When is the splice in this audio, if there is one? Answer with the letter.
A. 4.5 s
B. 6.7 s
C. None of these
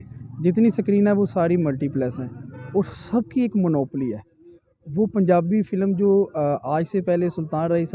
C